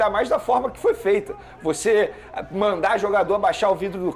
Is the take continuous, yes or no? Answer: yes